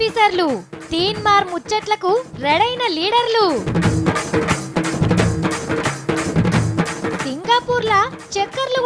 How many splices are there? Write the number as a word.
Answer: zero